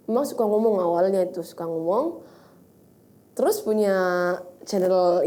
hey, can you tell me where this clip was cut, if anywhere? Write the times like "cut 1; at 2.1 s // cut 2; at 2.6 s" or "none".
none